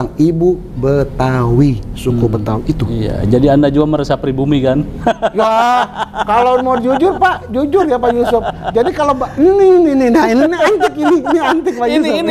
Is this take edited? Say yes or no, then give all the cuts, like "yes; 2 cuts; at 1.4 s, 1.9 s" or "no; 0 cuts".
no; 0 cuts